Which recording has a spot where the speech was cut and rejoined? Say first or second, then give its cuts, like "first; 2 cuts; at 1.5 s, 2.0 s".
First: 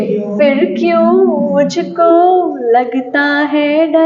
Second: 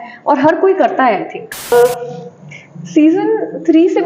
second; 1 cut; at 1.7 s